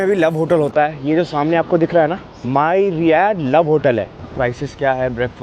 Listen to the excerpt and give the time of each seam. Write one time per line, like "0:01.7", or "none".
0:04.2

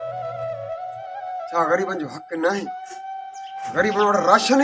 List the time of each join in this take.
0:01.2

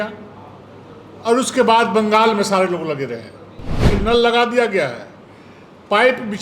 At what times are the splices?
0:03.9

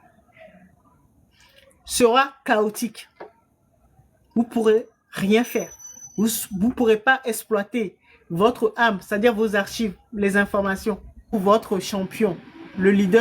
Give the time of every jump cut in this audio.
0:11.3

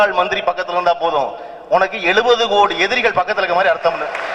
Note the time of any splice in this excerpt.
none

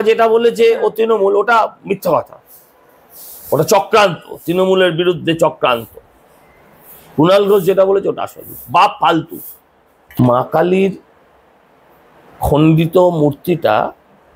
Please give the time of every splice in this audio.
0:10.2

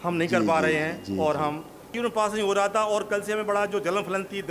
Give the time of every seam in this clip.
0:01.9

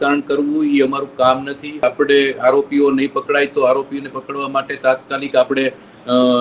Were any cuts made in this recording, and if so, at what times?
0:01.8

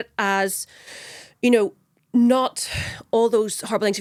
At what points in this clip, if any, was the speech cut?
none

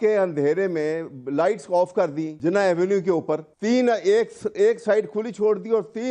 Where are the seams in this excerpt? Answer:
0:02.3
0:03.5

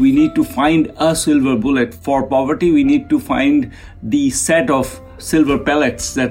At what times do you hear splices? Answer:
0:02.0
0:05.2

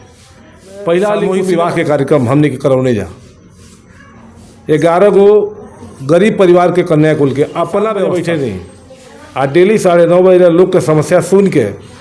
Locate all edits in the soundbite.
0:01.4
0:08.1

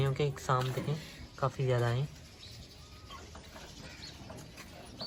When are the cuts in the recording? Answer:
none

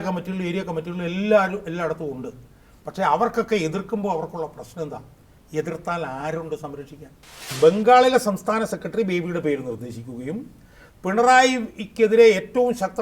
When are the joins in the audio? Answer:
0:07.6

